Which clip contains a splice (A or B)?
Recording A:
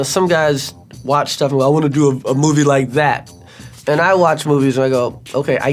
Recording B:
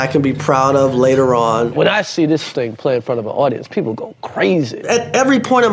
B